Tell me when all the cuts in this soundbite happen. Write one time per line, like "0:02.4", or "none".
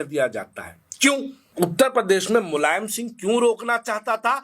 0:01.5